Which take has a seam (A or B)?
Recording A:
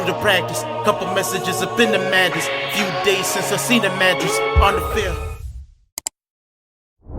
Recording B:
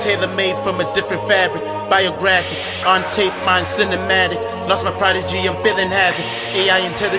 A